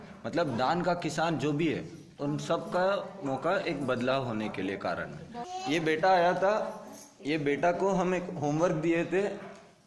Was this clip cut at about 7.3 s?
no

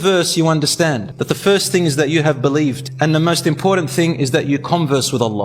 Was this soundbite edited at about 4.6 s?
no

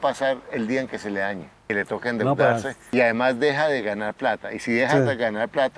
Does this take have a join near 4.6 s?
no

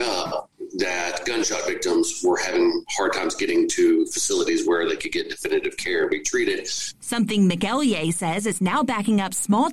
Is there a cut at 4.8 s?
no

